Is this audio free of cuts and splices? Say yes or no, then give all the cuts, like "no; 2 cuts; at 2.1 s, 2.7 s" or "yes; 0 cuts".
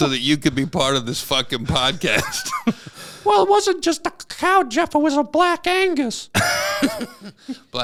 yes; 0 cuts